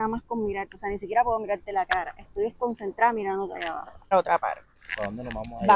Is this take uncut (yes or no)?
no